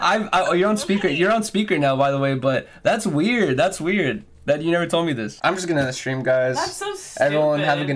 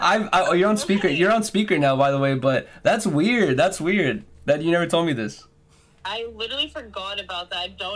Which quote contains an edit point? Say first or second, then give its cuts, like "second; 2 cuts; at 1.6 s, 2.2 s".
first; 1 cut; at 5.3 s